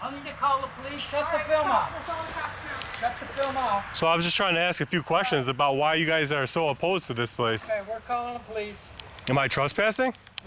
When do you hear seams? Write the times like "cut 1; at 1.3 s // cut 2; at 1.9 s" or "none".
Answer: none